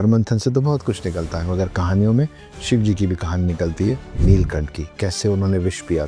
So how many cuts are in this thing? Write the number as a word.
zero